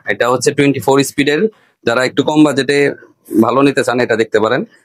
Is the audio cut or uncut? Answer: uncut